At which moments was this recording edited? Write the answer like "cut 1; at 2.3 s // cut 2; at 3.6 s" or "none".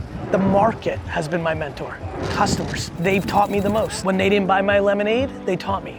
cut 1; at 1.0 s // cut 2; at 2.1 s // cut 3; at 2.9 s // cut 4; at 4.0 s